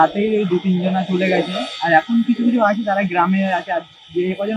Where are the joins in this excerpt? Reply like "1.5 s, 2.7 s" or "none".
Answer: none